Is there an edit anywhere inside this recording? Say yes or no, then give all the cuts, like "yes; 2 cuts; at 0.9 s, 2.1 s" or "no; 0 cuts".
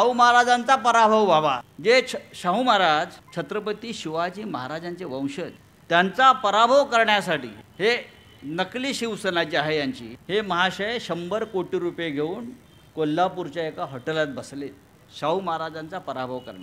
yes; 5 cuts; at 1.7 s, 3.2 s, 5.7 s, 7.6 s, 10.1 s